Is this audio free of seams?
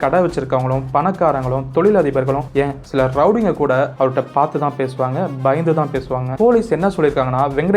no; 1 cut; at 6.3 s

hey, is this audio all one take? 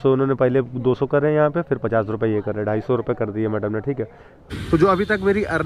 no; 1 cut; at 4.4 s

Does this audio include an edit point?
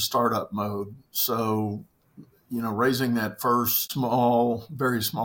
yes; 1 cut; at 3.8 s

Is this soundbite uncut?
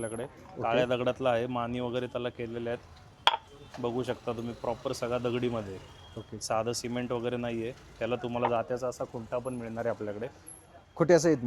yes; 0 cuts

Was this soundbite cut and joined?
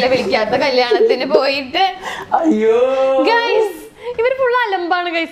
no; 0 cuts

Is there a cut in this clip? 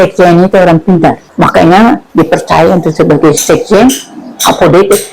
yes; 1 cut; at 1.2 s

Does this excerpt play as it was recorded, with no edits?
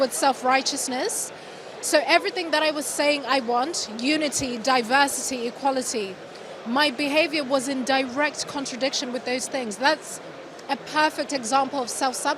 yes; 0 cuts

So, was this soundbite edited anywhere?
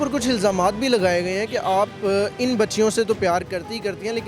no; 0 cuts

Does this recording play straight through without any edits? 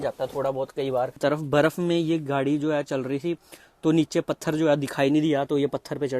no; 1 cut; at 1.1 s

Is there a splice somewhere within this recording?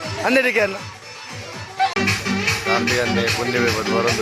yes; 1 cut; at 1.9 s

